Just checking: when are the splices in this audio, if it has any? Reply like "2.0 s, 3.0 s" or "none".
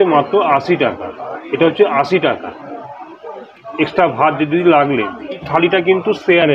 5.4 s